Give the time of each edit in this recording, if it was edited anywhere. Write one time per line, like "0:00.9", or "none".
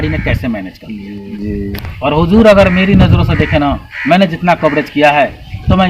0:01.2